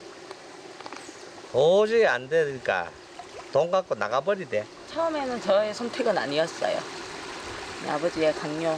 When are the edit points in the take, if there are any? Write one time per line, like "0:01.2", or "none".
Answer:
0:04.8